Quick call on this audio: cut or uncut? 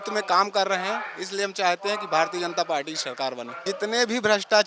cut